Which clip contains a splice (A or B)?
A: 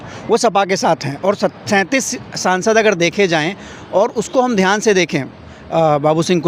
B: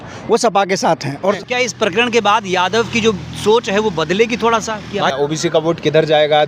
B